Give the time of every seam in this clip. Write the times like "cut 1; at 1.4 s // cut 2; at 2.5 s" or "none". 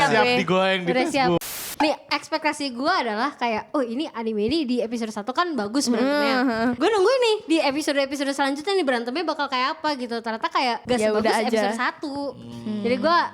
cut 1; at 1.4 s // cut 2; at 6.8 s // cut 3; at 10.8 s